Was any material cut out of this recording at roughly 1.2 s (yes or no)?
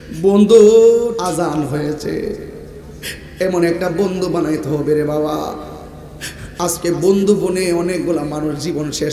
yes